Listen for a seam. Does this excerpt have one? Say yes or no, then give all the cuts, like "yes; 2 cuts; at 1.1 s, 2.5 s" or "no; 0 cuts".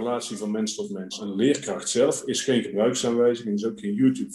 yes; 1 cut; at 1.1 s